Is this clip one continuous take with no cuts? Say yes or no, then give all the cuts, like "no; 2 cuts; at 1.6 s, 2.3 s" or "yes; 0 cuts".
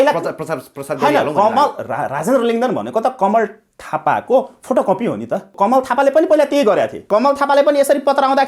no; 2 cuts; at 5.5 s, 7.0 s